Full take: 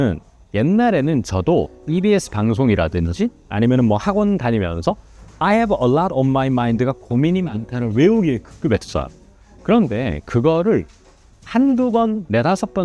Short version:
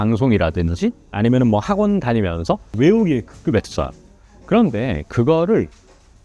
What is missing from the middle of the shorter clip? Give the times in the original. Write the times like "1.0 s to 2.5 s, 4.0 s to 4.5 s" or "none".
5.1 s to 7.8 s